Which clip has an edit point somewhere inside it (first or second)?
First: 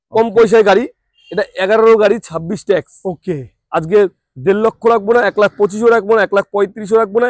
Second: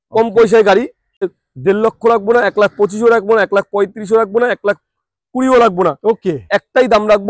second